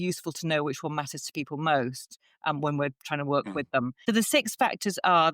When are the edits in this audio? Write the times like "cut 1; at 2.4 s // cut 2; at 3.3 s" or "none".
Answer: cut 1; at 4.0 s